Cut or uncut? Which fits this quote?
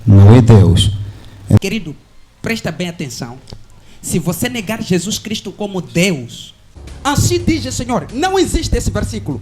cut